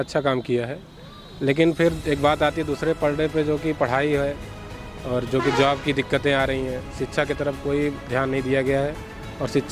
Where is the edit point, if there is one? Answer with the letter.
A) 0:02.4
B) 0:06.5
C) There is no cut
C